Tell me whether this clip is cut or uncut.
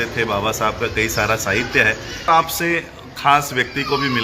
cut